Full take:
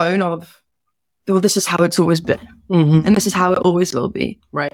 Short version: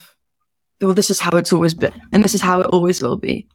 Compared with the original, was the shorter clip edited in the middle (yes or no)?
yes